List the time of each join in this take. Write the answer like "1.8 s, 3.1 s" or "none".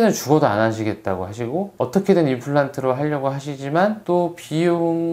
none